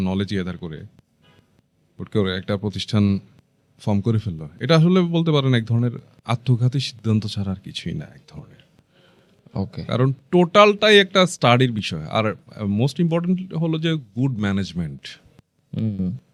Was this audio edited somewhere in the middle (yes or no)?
no